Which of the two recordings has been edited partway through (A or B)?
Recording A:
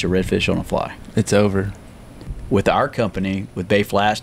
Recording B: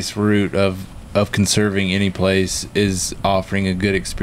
A